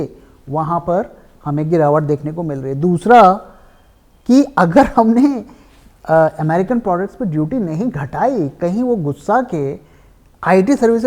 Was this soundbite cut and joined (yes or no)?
no